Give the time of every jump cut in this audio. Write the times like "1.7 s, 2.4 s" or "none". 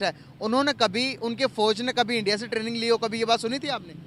none

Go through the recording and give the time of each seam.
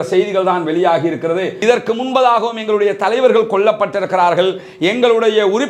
1.6 s

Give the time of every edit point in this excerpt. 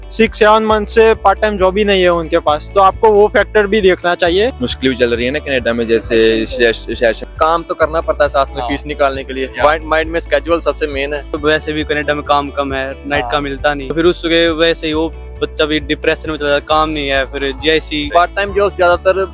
4.6 s, 7.2 s, 11.4 s, 13.9 s, 18.1 s

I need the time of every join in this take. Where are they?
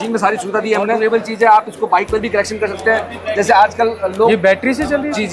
1.0 s

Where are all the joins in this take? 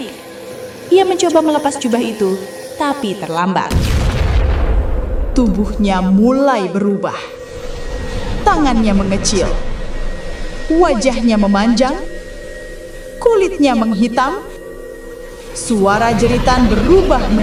none

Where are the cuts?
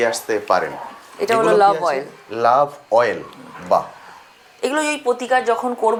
none

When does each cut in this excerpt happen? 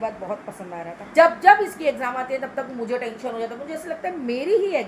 1.0 s

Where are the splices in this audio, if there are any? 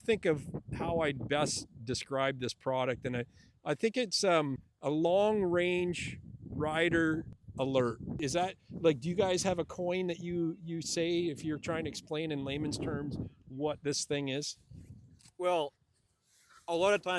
4.7 s, 7.4 s, 8.2 s

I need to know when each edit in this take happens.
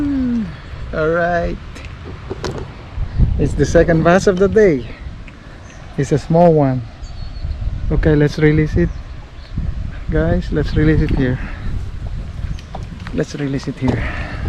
none

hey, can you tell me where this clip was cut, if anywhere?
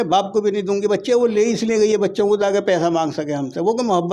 none

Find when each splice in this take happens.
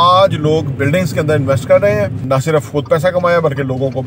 2.2 s

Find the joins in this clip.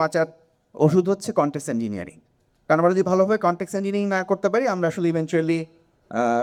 none

